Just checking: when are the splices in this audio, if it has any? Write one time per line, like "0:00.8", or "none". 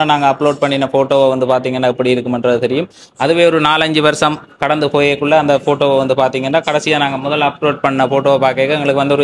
none

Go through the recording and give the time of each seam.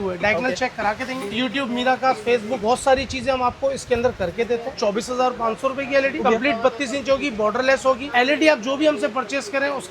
0:01.3
0:02.6
0:04.8
0:06.2
0:08.0

